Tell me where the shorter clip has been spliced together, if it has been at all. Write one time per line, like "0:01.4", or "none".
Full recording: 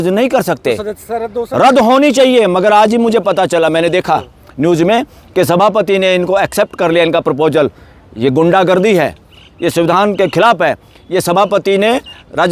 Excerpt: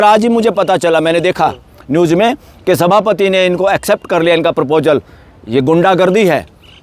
none

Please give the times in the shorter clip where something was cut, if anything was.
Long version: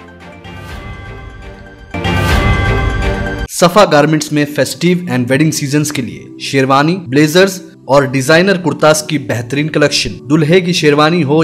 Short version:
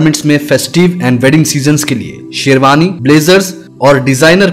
none

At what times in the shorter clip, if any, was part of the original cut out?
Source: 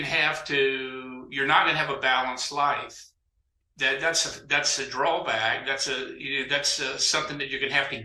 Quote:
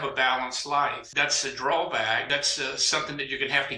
0:01.0
0:02.3

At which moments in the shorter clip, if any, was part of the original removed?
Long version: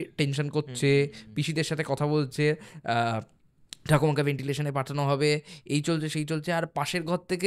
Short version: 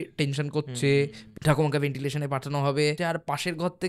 0:01.2
0:03.0

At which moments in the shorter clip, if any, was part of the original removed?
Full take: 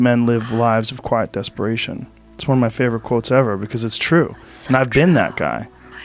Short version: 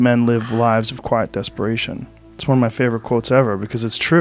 none

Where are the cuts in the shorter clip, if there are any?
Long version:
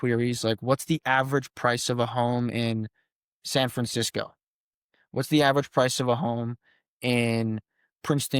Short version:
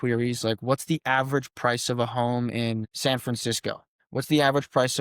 0:02.9
0:03.9

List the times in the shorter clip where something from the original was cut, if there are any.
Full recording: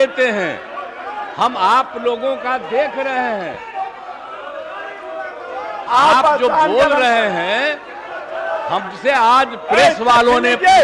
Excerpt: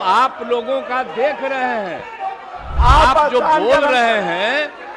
0:02.7

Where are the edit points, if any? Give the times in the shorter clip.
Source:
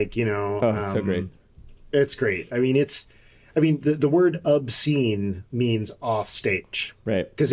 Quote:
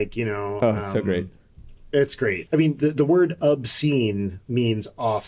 0:02.4

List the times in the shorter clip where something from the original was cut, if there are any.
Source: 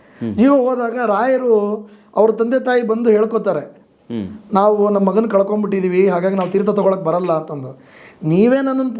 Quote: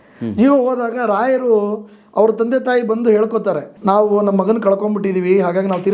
0:03.7

